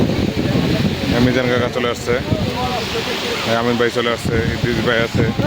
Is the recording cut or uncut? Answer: uncut